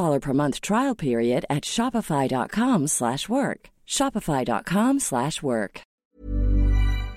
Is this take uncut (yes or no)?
no